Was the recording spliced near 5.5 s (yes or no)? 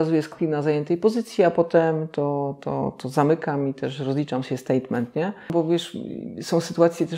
yes